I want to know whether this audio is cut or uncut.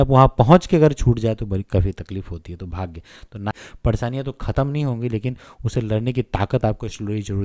cut